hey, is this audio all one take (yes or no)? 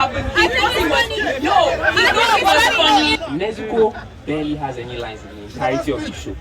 no